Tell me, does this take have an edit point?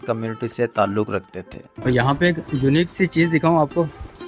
yes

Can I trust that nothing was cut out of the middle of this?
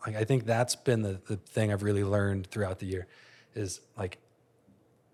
yes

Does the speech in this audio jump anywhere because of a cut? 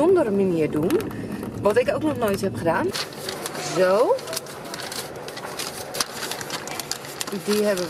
yes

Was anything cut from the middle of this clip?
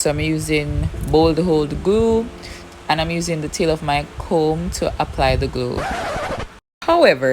yes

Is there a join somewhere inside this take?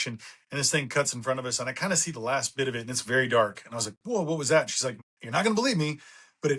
yes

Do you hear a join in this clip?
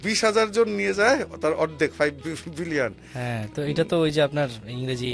no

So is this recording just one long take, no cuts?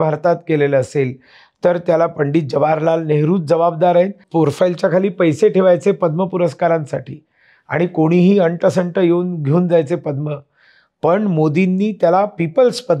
no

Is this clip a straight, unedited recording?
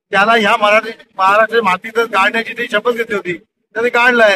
yes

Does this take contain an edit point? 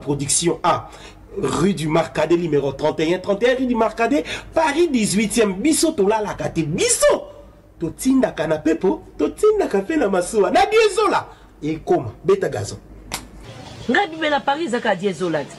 no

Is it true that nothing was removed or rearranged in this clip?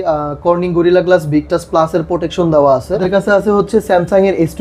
no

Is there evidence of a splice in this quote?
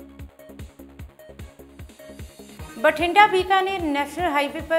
yes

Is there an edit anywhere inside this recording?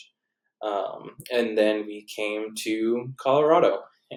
no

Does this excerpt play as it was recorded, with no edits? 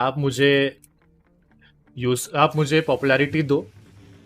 yes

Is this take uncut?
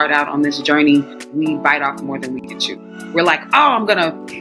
no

